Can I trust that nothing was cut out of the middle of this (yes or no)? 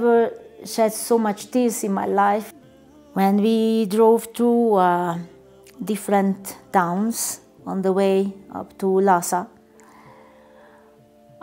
no